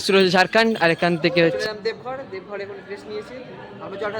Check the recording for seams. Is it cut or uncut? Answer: cut